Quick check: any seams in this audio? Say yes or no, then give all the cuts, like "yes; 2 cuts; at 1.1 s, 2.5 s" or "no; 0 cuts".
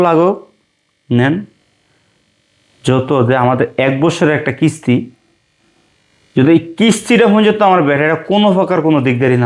no; 0 cuts